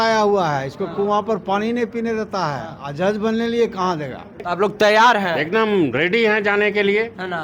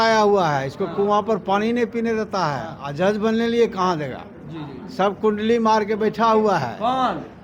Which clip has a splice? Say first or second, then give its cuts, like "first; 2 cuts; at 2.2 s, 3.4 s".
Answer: first; 1 cut; at 4.5 s